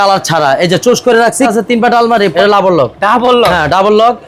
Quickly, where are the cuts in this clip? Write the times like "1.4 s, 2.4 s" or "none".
1.5 s, 2.3 s